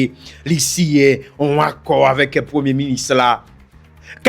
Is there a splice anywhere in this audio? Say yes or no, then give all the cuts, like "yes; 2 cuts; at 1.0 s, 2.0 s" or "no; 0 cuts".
no; 0 cuts